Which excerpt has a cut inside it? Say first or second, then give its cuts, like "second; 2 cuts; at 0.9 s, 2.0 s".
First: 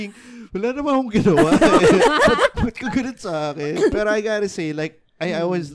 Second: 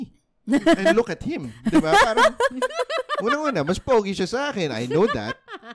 first; 1 cut; at 3.9 s